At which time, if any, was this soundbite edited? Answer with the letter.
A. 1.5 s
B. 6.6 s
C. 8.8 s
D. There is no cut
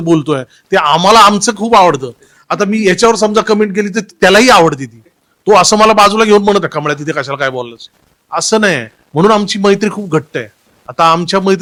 D